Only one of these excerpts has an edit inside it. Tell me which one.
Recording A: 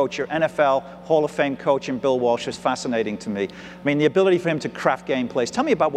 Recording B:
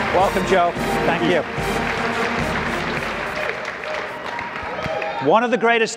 B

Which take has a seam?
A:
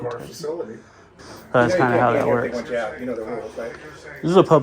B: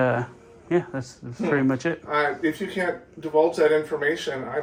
A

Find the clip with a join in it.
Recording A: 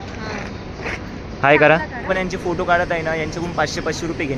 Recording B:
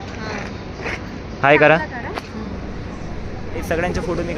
A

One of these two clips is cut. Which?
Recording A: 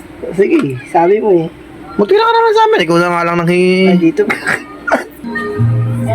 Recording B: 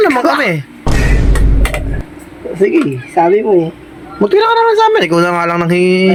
A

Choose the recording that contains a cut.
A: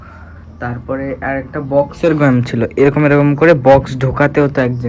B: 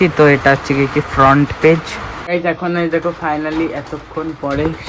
B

